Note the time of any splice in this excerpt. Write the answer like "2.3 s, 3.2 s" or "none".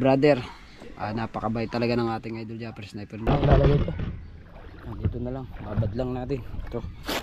3.3 s

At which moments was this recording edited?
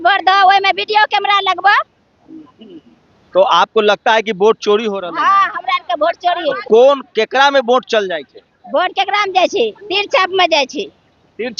none

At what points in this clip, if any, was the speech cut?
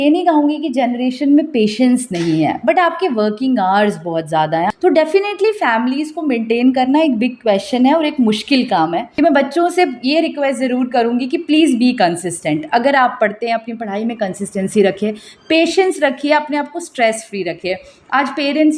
4.7 s, 9.0 s

